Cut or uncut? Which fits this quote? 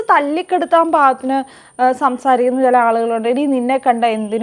uncut